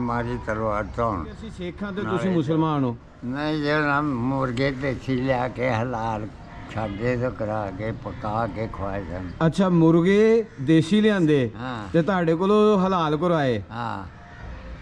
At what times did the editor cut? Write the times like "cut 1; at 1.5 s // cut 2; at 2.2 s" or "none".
cut 1; at 1.9 s

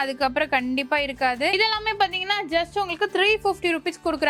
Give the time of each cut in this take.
cut 1; at 1.5 s

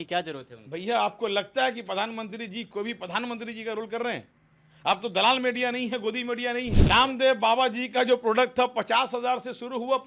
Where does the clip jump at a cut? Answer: cut 1; at 6.8 s

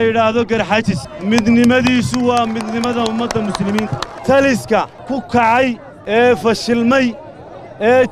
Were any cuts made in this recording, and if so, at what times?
cut 1; at 1.1 s // cut 2; at 4.1 s // cut 3; at 5.0 s // cut 4; at 5.9 s

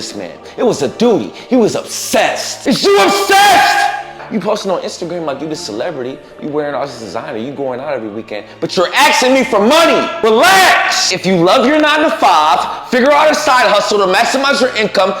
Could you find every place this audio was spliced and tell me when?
cut 1; at 2.5 s // cut 2; at 4.3 s // cut 3; at 10.1 s // cut 4; at 11.1 s

